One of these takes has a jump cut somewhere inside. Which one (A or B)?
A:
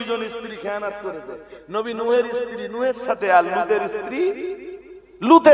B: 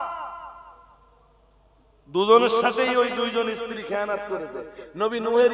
B